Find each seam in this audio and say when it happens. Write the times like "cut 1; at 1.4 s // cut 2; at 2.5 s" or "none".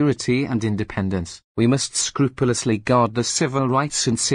cut 1; at 1.4 s